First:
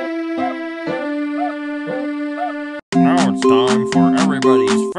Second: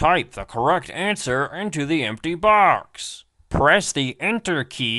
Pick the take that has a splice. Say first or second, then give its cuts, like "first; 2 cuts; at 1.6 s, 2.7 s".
first; 1 cut; at 2.8 s